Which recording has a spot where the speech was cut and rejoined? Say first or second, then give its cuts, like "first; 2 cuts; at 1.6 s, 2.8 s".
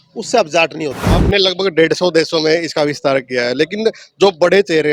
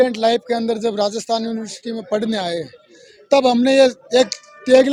first; 1 cut; at 1.0 s